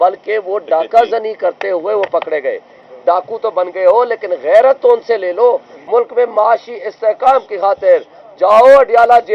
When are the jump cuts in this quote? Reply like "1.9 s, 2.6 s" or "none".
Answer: 2.9 s, 5.7 s